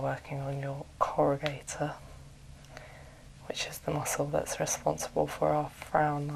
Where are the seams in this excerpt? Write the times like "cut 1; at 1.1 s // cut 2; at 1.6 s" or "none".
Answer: none

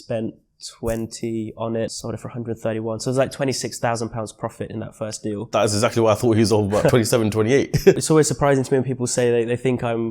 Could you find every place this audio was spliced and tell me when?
cut 1; at 2.0 s // cut 2; at 5.4 s // cut 3; at 8.0 s

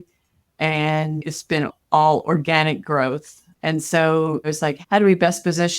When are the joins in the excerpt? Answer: cut 1; at 1.2 s // cut 2; at 4.5 s

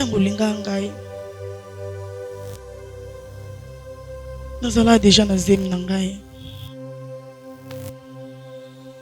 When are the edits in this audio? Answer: cut 1; at 1.0 s // cut 2; at 4.6 s // cut 3; at 6.4 s

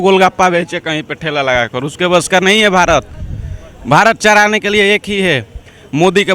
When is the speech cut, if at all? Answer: none

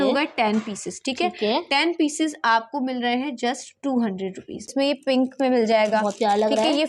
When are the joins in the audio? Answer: cut 1; at 4.7 s

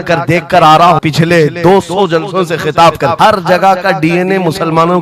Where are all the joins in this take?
cut 1; at 1.0 s // cut 2; at 3.1 s

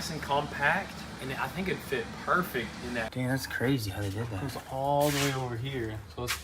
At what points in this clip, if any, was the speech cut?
cut 1; at 3.1 s

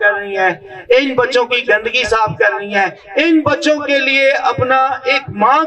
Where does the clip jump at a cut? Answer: none

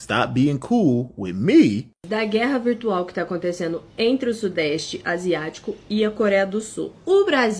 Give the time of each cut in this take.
cut 1; at 2.1 s

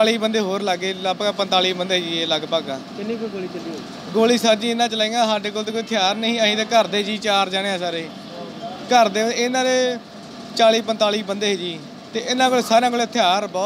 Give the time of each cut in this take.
none

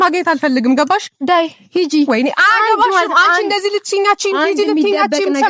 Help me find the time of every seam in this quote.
none

